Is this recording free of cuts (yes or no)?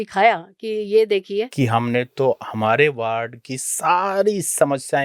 no